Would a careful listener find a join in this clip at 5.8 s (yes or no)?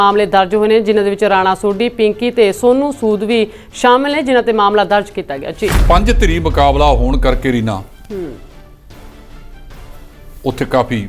yes